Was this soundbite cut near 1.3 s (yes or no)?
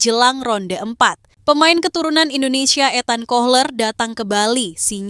yes